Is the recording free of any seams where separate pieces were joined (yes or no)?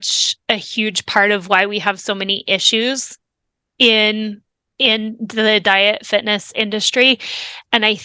yes